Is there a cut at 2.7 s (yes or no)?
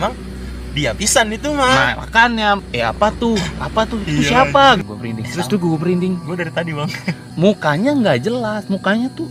yes